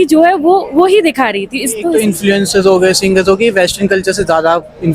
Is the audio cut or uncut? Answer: cut